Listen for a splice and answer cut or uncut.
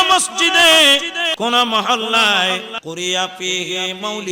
cut